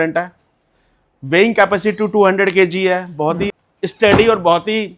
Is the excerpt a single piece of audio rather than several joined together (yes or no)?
no